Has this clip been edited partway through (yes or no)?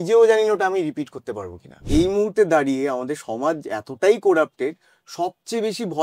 yes